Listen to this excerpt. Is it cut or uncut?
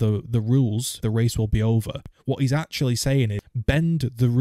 cut